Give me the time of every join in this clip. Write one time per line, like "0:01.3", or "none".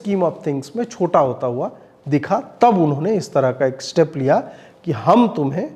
none